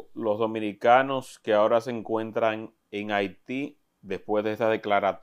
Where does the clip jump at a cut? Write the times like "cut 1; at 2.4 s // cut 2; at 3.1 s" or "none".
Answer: none